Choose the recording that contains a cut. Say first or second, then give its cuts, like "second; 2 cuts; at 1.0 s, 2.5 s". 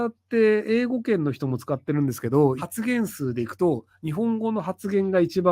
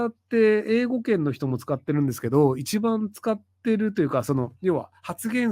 first; 1 cut; at 2.6 s